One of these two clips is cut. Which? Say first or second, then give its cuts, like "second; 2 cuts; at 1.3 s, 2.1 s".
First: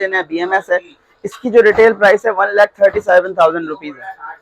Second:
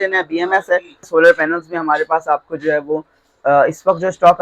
second; 1 cut; at 1.0 s